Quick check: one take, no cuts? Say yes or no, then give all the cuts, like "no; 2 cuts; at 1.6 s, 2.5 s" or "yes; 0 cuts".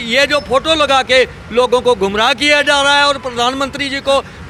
yes; 0 cuts